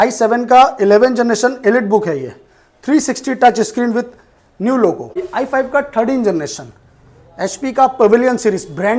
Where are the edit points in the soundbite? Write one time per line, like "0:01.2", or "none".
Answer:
0:05.3